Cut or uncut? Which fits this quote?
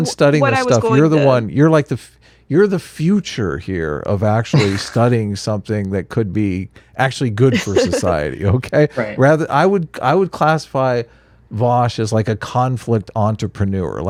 uncut